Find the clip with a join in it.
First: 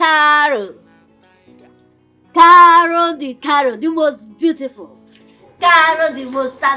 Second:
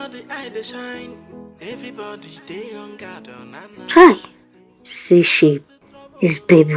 second; 1 cut; at 3.3 s

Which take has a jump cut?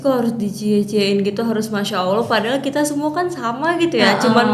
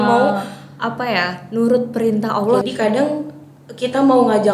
second; 1 cut; at 2.6 s

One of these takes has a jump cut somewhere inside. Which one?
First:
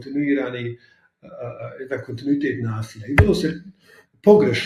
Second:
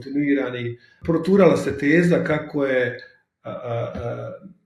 second; 1 cut; at 1.0 s

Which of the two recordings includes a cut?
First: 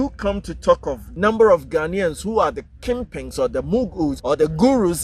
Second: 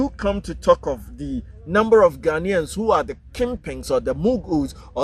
first; 2 cuts; at 1.0 s, 4.2 s

